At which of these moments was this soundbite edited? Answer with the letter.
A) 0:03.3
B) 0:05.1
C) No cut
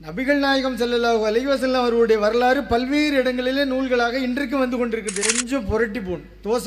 B